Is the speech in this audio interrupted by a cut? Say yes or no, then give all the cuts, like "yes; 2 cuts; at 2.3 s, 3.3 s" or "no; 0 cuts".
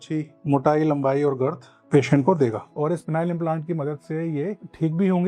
yes; 1 cut; at 2.6 s